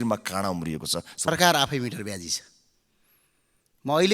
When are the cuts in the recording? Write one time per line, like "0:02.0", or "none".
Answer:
0:01.3